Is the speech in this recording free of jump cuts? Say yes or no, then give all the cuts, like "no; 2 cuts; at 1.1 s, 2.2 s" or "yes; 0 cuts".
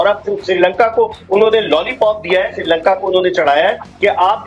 yes; 0 cuts